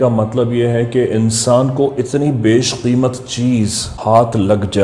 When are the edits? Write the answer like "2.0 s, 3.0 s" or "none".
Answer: 3.9 s